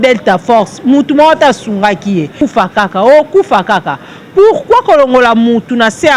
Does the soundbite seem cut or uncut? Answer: cut